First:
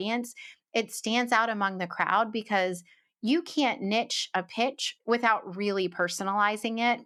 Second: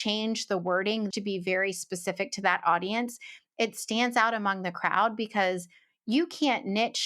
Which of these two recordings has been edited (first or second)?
second